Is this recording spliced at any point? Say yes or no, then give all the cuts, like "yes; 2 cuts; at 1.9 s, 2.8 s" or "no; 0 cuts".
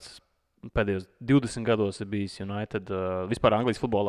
no; 0 cuts